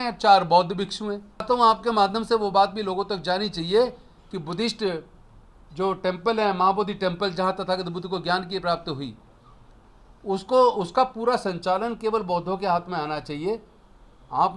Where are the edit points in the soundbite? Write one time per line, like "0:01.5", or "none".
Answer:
0:01.4